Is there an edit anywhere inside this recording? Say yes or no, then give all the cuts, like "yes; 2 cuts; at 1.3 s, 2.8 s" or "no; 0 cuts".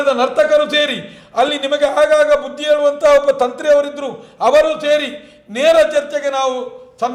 no; 0 cuts